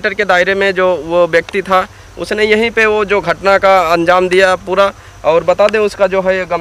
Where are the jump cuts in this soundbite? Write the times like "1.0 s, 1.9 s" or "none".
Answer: none